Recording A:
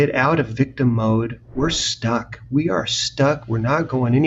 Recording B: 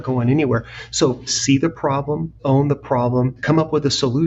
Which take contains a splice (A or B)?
B